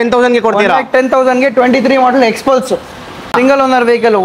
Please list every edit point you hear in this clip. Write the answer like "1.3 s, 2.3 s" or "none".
3.3 s